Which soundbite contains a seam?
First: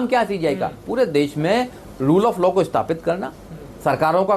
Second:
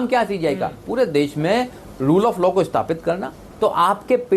second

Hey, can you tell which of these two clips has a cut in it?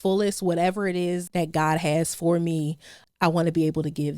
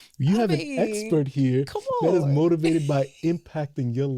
first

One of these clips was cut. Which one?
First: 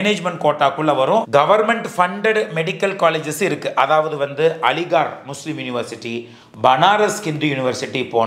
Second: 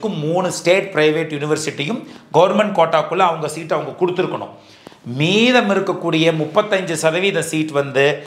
first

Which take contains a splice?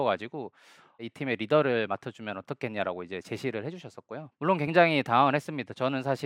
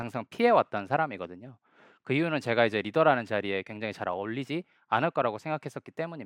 first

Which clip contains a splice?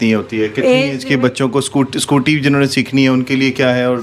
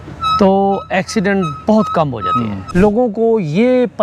second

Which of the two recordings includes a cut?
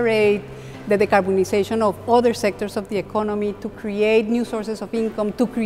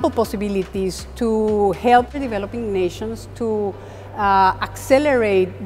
second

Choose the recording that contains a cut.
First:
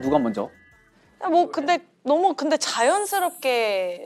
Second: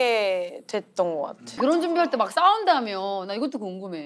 second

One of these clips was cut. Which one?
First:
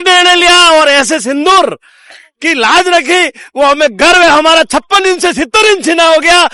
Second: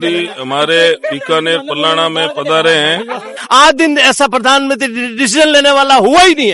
second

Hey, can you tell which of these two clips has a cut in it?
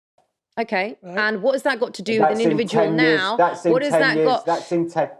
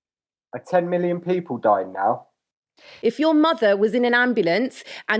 second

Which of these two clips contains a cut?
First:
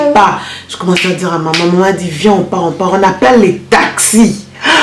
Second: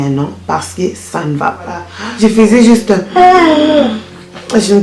second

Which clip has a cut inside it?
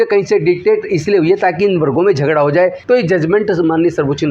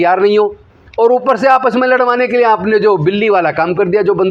first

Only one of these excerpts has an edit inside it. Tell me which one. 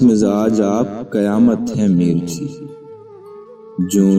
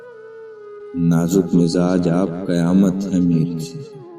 second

